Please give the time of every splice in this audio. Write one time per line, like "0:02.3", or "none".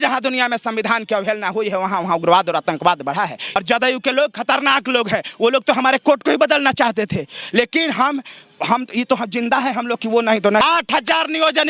0:03.4
0:10.6